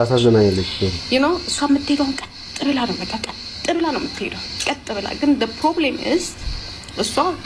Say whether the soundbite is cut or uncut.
uncut